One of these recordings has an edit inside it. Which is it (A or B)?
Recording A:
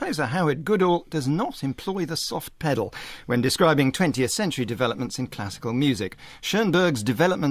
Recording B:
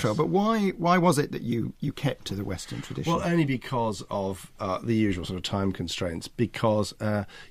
B